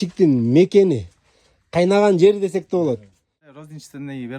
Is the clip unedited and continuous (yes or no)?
no